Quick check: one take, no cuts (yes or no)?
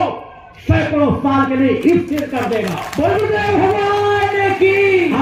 yes